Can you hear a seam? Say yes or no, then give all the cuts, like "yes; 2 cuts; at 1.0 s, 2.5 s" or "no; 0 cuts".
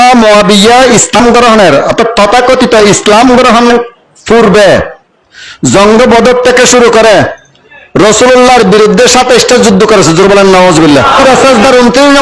yes; 2 cuts; at 1.2 s, 11.2 s